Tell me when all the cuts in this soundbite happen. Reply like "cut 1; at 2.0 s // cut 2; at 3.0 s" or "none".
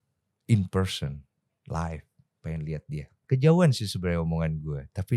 cut 1; at 3.1 s